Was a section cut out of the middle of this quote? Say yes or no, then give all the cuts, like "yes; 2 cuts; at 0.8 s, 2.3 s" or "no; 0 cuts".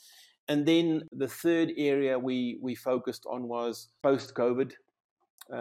yes; 2 cuts; at 1.1 s, 3.9 s